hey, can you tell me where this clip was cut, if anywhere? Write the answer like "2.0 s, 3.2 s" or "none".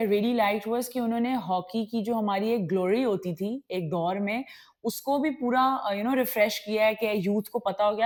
none